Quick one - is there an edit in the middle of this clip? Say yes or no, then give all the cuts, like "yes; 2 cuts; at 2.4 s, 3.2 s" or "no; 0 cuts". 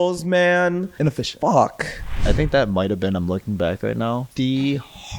yes; 3 cuts; at 0.9 s, 2.2 s, 4.3 s